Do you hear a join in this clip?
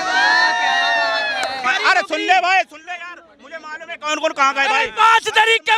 yes; 1 cut; at 1.6 s

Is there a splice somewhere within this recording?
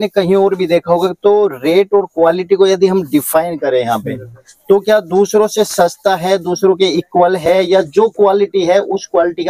no; 0 cuts

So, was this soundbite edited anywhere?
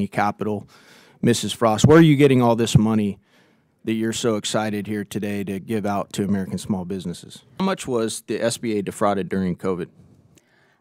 yes; 1 cut; at 7.6 s

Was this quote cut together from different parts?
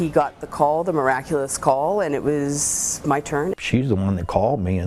no; 0 cuts

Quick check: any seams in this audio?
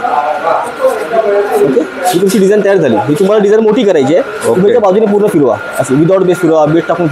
no; 0 cuts

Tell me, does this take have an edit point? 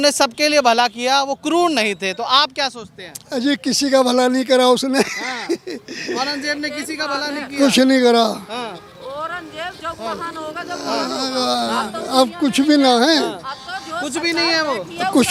no; 0 cuts

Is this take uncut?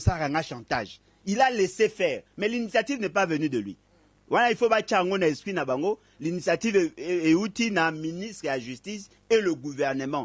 yes; 0 cuts

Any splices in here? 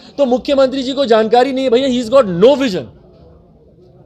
no; 0 cuts

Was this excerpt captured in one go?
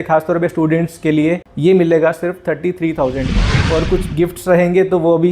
no; 1 cut; at 3.5 s

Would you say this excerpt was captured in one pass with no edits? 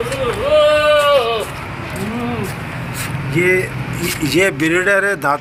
yes; 0 cuts

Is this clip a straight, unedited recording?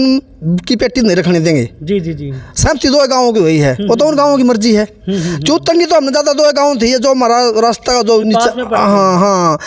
yes; 0 cuts

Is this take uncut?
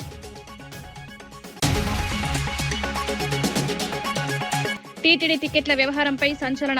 no; 3 cuts; at 1.6 s, 3.1 s, 4.9 s

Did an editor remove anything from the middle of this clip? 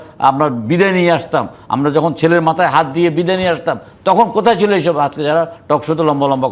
no; 0 cuts

